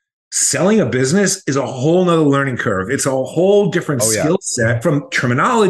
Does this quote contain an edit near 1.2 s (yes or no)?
no